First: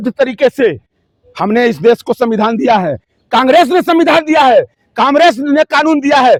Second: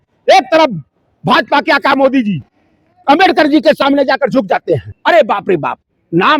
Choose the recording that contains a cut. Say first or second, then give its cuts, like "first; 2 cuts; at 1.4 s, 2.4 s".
second; 1 cut; at 4.9 s